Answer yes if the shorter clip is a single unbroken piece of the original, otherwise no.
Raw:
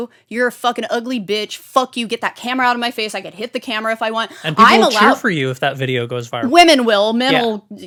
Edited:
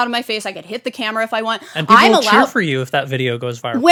yes